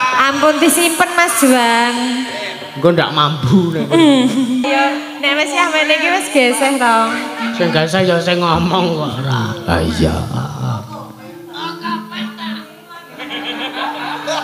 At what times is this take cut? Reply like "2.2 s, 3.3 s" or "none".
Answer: 4.6 s